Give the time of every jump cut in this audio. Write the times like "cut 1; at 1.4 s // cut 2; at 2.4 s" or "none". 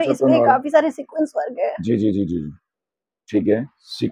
none

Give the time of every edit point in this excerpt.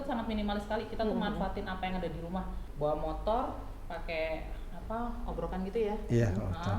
cut 1; at 2.6 s

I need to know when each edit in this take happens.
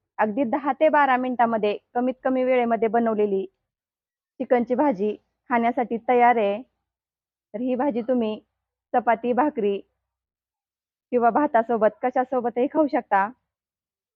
none

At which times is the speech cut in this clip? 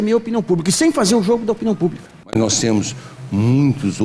cut 1; at 2.0 s

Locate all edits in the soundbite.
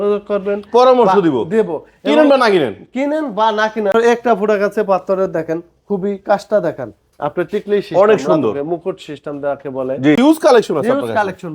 cut 1; at 3.9 s // cut 2; at 10.2 s

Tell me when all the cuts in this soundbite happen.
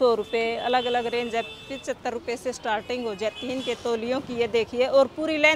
none

